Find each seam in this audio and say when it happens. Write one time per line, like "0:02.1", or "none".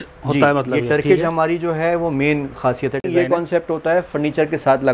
0:03.0